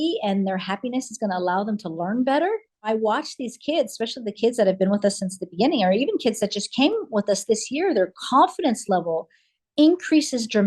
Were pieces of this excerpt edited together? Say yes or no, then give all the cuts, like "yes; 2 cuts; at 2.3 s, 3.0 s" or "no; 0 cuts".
yes; 1 cut; at 2.9 s